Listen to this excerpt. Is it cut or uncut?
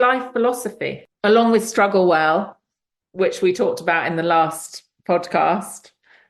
cut